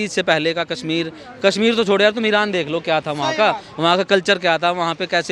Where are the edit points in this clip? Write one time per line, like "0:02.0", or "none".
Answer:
none